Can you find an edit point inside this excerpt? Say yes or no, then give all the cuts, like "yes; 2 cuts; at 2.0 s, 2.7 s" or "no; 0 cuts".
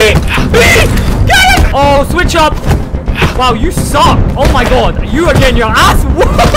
yes; 2 cuts; at 1.7 s, 4.3 s